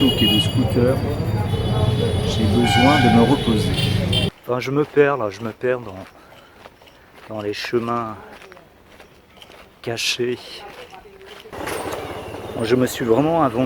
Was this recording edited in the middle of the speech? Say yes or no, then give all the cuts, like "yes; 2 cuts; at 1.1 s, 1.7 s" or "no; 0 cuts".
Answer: yes; 2 cuts; at 4.3 s, 11.5 s